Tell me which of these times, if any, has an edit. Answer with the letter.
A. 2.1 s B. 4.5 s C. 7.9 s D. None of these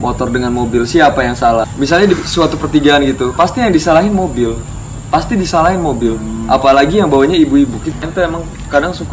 C